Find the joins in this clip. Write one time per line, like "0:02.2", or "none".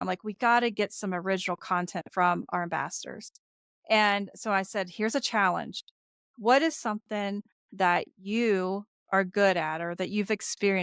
none